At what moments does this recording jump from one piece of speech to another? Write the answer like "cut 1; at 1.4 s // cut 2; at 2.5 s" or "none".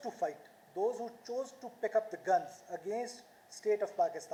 none

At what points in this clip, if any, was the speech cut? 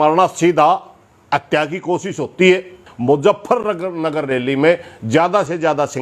cut 1; at 2.9 s

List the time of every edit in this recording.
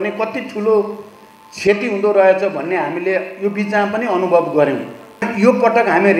cut 1; at 5.3 s

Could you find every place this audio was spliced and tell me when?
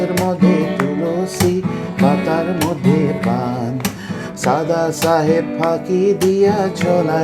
none

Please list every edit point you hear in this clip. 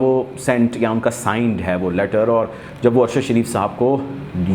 none

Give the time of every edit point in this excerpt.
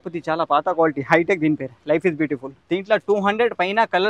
cut 1; at 2.5 s

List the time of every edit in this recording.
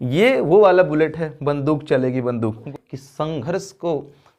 cut 1; at 2.7 s

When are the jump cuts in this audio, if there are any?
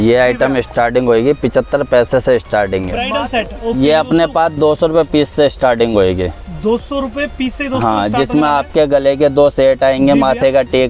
cut 1; at 3.0 s

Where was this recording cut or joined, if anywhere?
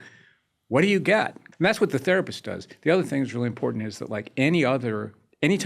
cut 1; at 1.4 s

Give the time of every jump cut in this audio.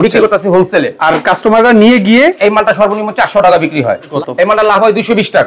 cut 1; at 4.2 s

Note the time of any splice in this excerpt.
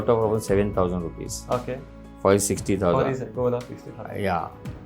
none

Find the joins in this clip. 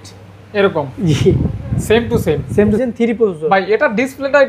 cut 1; at 2.8 s

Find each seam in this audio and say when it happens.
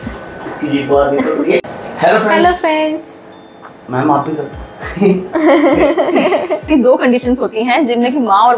cut 1; at 1.7 s // cut 2; at 6.6 s

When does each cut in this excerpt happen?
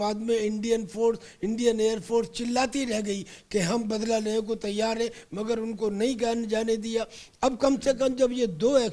none

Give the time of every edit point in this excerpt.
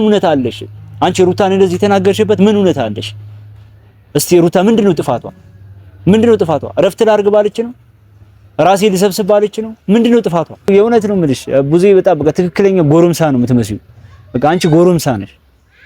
cut 1; at 10.7 s

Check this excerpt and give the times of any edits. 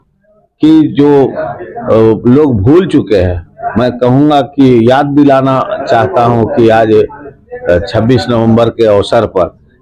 none

